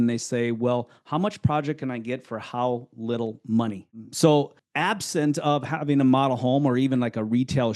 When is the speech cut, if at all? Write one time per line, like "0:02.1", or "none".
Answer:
0:03.9
0:04.6